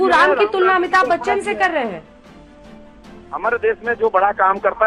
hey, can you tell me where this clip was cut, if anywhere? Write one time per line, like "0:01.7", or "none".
none